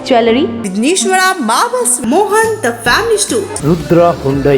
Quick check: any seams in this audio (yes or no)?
no